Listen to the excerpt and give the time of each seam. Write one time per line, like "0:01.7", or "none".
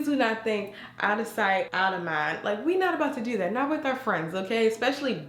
none